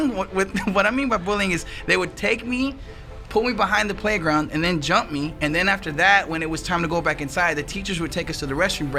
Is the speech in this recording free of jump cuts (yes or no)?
yes